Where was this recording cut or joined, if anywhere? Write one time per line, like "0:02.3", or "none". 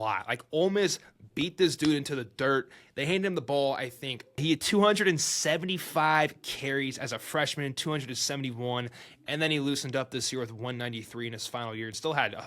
0:04.4